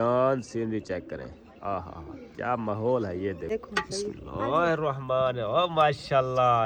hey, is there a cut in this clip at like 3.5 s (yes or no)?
yes